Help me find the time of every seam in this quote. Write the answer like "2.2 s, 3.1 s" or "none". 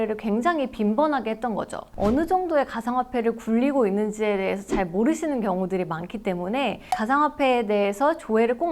1.8 s, 6.8 s